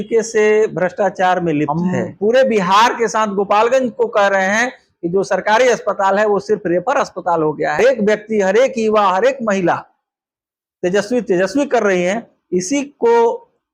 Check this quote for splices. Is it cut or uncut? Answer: cut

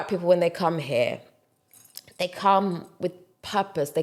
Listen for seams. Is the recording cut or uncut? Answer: uncut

